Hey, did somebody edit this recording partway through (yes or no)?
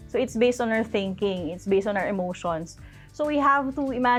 no